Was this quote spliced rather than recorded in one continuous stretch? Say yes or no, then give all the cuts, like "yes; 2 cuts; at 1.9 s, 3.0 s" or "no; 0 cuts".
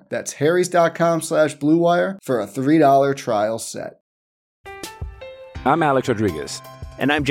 yes; 1 cut; at 3.9 s